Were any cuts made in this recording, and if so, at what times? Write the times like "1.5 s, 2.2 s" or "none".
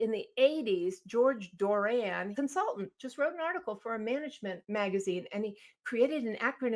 2.3 s, 4.6 s